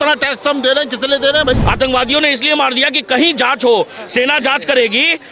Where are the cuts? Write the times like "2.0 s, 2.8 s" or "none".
1.6 s